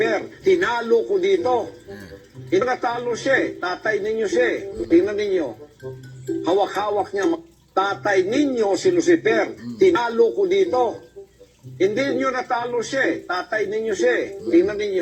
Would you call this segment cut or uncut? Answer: uncut